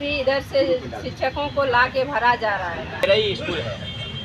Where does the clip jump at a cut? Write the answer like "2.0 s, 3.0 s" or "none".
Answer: 3.0 s